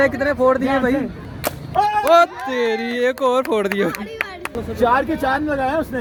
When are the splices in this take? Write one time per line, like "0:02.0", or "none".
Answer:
none